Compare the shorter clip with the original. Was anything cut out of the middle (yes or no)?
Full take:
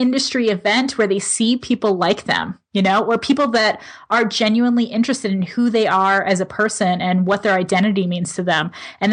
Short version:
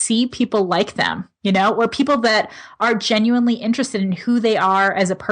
no